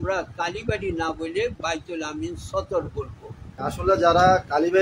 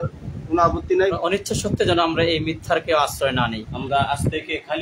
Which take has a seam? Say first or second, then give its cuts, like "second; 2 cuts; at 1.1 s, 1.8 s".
second; 2 cuts; at 1.1 s, 3.7 s